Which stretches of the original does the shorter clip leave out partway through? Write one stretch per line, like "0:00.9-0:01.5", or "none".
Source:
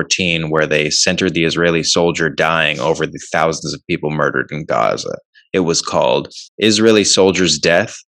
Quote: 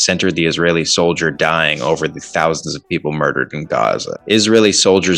0:05.1-0:06.4